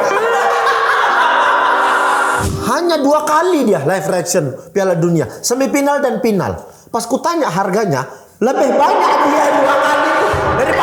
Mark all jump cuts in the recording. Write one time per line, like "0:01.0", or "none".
0:02.4